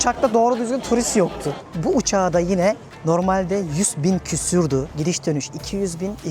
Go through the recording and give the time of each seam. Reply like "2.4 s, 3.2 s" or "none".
1.5 s, 4.9 s